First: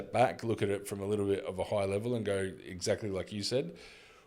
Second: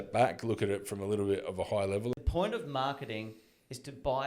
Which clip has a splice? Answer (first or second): second